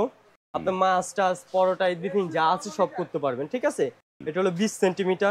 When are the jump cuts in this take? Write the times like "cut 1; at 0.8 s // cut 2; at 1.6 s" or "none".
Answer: none

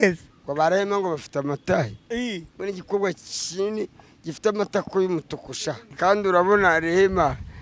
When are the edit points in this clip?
cut 1; at 5.9 s

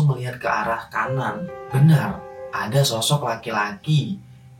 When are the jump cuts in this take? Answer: cut 1; at 1.6 s

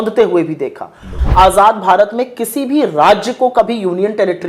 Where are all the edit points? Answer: cut 1; at 1.1 s

